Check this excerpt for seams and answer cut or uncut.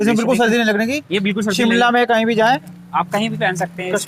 uncut